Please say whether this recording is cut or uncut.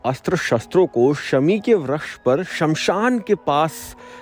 uncut